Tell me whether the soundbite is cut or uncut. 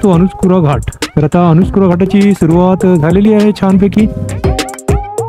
cut